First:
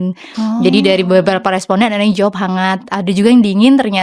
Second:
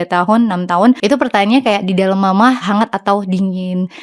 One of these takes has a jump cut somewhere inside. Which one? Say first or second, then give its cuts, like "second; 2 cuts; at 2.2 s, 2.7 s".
second; 2 cuts; at 1.0 s, 2.6 s